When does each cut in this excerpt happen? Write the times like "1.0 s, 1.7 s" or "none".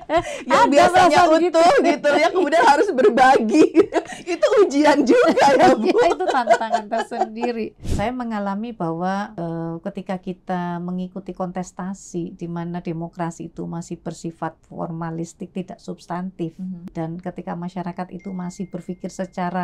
7.8 s, 9.3 s, 16.9 s